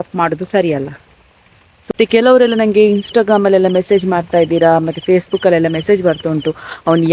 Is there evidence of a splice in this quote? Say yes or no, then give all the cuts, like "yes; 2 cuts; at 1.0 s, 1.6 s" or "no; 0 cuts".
yes; 1 cut; at 1.9 s